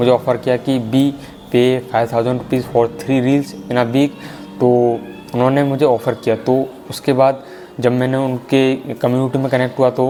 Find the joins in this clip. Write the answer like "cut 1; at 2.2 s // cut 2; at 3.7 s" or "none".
none